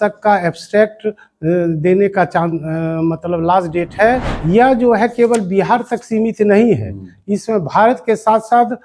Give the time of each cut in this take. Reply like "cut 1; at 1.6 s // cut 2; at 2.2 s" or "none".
cut 1; at 4.3 s